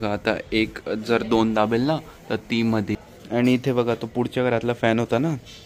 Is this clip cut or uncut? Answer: cut